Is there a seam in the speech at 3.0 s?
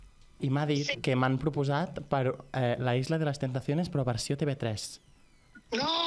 no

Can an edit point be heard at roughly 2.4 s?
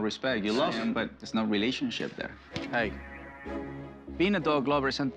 yes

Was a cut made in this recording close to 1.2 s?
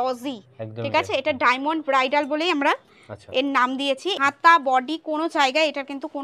no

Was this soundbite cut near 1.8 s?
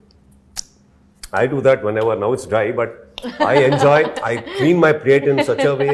no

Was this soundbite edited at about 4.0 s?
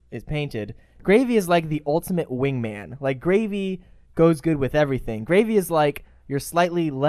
no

